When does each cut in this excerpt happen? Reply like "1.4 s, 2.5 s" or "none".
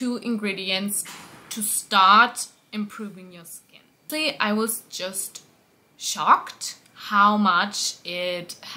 4.1 s